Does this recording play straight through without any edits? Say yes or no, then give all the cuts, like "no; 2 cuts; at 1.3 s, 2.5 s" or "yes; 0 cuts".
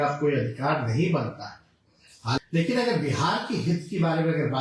no; 1 cut; at 2.4 s